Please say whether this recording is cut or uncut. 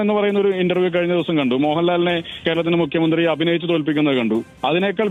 uncut